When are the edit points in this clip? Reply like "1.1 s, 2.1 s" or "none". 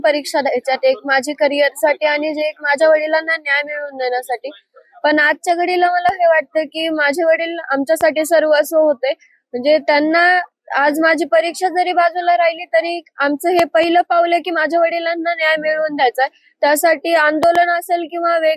none